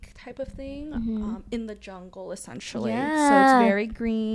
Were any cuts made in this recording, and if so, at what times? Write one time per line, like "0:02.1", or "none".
none